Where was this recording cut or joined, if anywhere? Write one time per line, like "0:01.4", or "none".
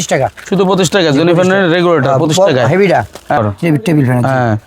0:03.4